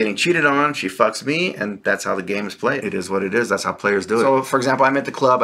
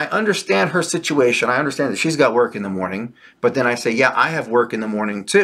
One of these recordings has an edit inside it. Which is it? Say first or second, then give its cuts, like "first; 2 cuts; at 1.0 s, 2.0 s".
first; 1 cut; at 4.2 s